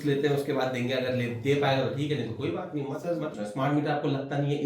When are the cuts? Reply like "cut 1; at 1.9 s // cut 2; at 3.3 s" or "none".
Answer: cut 1; at 3.3 s